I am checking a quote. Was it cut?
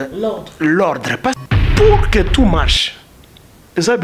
yes; 1 cut; at 1.4 s

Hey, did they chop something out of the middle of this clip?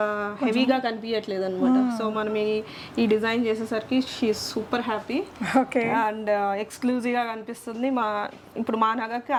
no; 0 cuts

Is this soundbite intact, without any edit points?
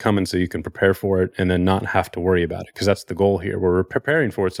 yes; 0 cuts

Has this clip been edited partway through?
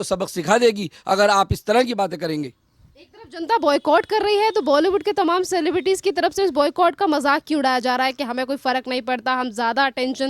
no; 0 cuts

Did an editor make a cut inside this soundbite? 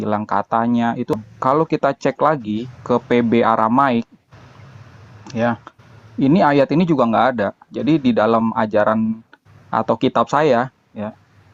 yes; 1 cut; at 1.1 s

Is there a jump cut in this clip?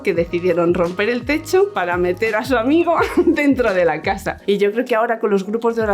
yes; 2 cuts; at 1.8 s, 4.3 s

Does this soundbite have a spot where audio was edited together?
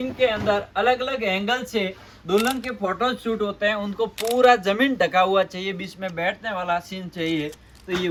no; 0 cuts

